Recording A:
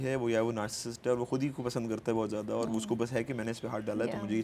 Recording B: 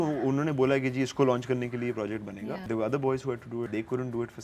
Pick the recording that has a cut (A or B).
B